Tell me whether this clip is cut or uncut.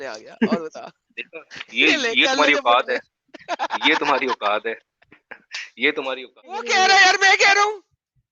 cut